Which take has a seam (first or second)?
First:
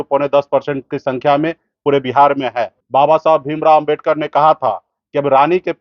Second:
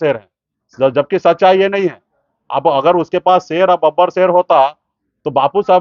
first